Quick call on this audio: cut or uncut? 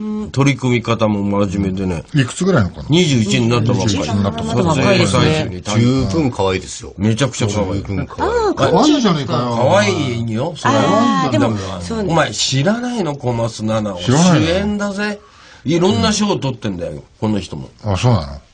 cut